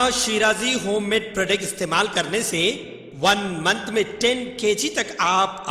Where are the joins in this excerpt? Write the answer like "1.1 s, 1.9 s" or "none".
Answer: none